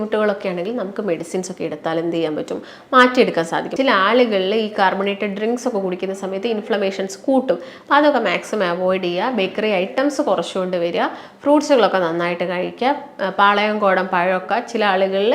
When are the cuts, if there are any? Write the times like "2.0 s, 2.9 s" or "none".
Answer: 3.7 s